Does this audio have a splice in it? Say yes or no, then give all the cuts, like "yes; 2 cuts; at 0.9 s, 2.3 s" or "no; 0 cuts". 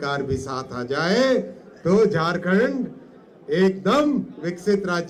no; 0 cuts